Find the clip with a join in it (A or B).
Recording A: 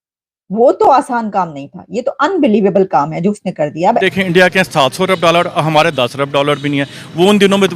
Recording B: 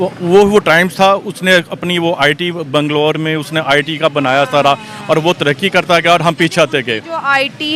A